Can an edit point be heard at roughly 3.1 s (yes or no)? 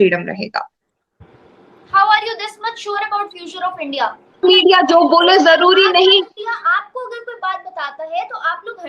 no